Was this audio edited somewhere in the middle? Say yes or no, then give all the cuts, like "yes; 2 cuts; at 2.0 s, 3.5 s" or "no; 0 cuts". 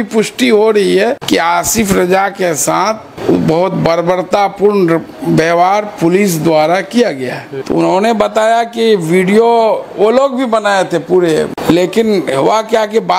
yes; 4 cuts; at 1.2 s, 3.1 s, 7.4 s, 11.6 s